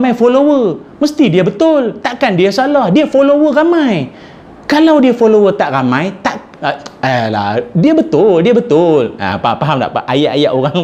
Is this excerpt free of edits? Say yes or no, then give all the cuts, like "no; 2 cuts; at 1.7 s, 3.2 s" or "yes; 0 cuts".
yes; 0 cuts